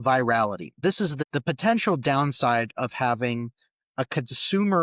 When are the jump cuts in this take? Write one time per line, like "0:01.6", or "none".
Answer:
0:01.1